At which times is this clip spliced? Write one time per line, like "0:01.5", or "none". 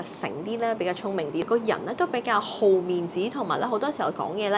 0:01.5